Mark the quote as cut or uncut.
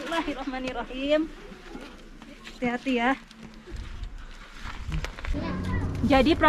cut